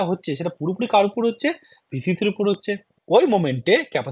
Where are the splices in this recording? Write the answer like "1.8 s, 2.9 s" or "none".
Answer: 2.9 s